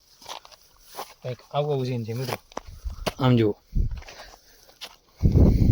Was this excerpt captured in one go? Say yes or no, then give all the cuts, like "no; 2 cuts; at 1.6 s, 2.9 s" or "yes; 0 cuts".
yes; 0 cuts